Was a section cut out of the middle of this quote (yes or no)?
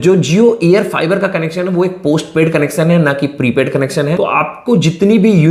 yes